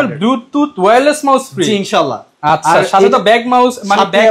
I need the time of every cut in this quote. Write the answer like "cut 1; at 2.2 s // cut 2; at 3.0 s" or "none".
none